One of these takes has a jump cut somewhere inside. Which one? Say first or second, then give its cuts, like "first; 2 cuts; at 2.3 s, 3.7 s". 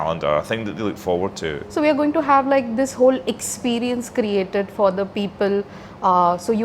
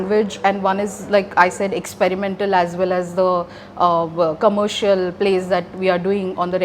first; 1 cut; at 1.6 s